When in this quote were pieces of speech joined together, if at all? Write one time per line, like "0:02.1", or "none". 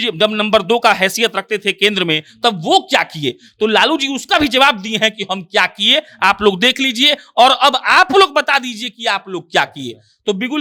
none